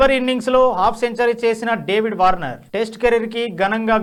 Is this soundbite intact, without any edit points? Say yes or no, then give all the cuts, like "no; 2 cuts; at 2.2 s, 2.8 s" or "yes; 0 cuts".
yes; 0 cuts